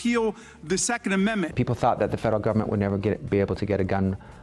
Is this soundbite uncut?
no; 1 cut; at 1.5 s

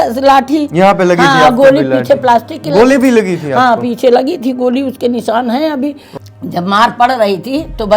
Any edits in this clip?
yes; 1 cut; at 6.0 s

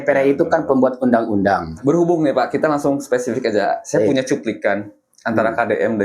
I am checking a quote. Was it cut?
yes; 1 cut; at 1.8 s

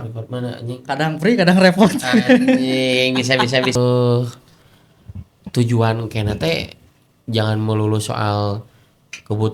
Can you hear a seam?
yes; 1 cut; at 3.8 s

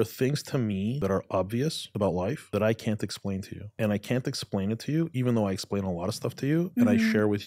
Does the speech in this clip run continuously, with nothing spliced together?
no; 3 cuts; at 1.0 s, 2.3 s, 3.6 s

